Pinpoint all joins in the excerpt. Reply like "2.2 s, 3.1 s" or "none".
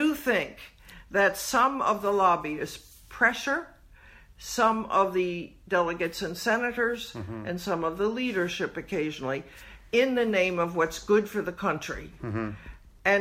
none